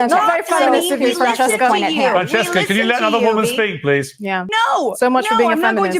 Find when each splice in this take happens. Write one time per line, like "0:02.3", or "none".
0:04.5